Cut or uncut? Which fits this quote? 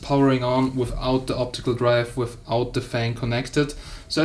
uncut